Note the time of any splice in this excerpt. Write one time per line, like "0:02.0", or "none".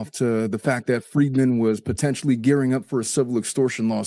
none